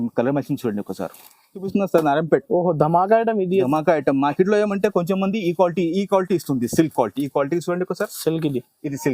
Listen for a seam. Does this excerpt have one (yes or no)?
yes